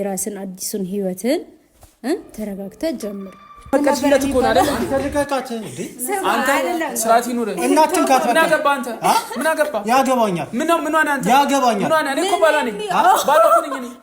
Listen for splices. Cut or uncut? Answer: cut